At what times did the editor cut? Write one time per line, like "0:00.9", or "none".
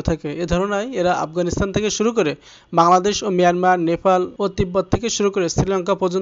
0:04.3